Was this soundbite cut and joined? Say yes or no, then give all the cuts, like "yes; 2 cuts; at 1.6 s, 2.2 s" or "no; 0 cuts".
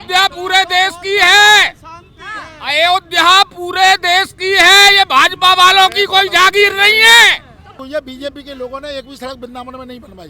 yes; 1 cut; at 7.8 s